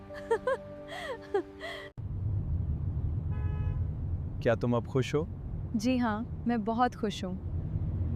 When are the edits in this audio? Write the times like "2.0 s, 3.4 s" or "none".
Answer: 2.0 s